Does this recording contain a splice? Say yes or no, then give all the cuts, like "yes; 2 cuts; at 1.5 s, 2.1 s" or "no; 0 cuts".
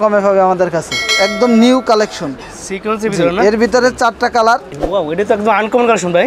yes; 2 cuts; at 1.0 s, 4.7 s